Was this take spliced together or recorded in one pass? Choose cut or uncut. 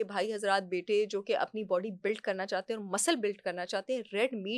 uncut